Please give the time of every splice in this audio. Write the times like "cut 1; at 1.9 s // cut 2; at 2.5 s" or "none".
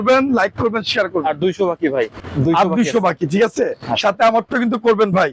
cut 1; at 2.2 s